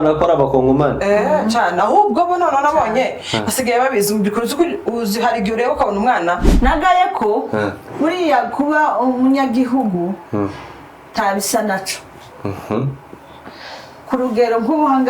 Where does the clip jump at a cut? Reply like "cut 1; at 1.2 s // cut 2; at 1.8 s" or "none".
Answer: cut 1; at 6.5 s